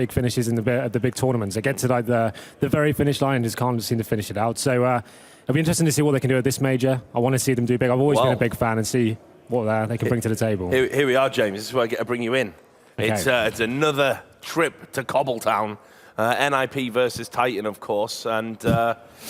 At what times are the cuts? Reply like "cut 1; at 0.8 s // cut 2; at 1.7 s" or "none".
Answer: cut 1; at 5.7 s